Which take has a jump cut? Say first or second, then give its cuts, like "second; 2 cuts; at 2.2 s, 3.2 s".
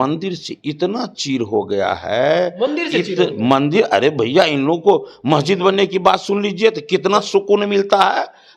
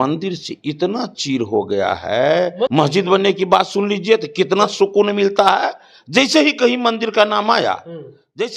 second; 1 cut; at 2.7 s